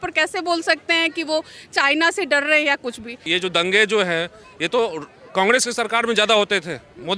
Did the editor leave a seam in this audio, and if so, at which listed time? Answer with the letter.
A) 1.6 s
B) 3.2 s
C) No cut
B